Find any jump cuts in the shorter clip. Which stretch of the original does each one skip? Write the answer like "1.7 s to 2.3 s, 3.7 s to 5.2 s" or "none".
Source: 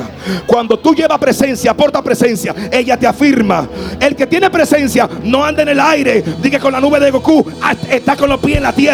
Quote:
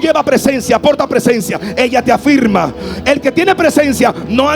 none